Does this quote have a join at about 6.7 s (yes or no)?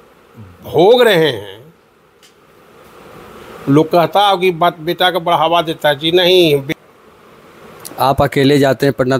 yes